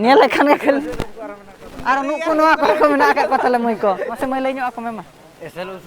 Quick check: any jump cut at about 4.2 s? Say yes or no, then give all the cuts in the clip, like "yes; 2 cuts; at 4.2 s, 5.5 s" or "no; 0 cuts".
yes; 1 cut; at 4.2 s